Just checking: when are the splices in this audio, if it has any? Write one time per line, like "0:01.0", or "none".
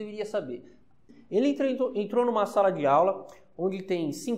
0:01.1

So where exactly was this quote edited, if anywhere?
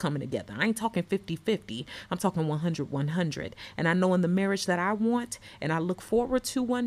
none

